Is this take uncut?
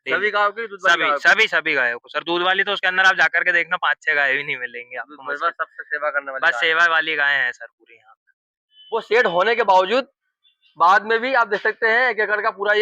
no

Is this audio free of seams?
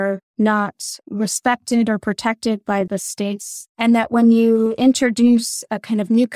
no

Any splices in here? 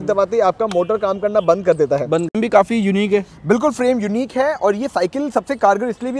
yes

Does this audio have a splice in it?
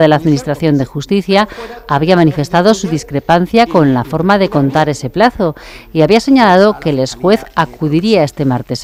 no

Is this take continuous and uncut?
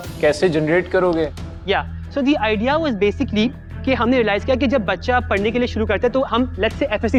yes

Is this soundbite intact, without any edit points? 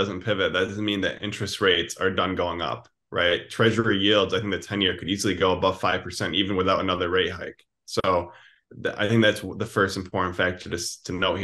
yes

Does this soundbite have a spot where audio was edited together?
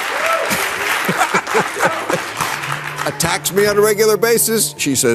no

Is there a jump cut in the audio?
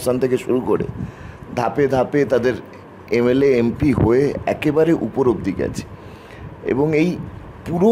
no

